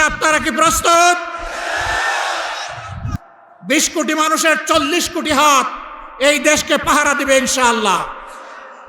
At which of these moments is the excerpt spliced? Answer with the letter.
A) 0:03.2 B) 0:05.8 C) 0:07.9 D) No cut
A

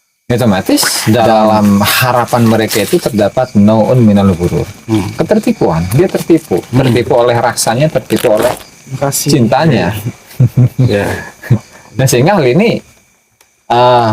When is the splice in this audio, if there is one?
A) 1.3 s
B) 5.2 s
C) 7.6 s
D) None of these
A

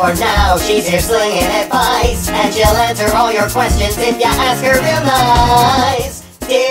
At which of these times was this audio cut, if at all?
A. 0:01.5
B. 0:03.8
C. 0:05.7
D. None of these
B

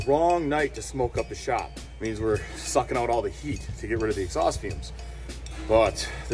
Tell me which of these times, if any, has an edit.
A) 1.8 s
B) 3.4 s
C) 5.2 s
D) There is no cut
A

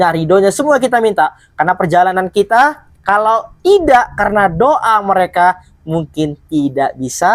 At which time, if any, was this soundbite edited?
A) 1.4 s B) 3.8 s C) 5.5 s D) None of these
D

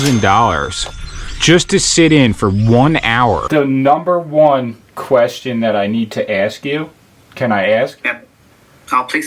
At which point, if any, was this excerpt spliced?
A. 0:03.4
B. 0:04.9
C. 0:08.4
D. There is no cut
A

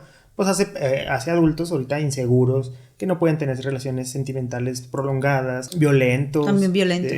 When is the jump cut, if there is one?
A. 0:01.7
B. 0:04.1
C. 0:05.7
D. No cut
C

